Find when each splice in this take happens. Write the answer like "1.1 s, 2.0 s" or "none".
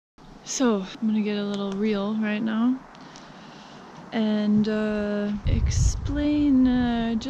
0.9 s, 5.5 s